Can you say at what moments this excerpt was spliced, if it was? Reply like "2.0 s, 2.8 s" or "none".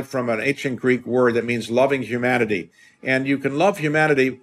none

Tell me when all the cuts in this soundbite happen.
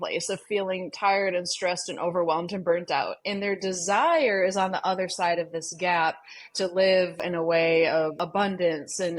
7.2 s, 8.2 s

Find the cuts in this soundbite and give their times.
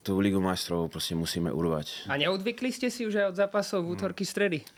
none

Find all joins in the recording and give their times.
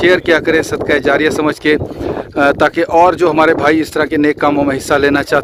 none

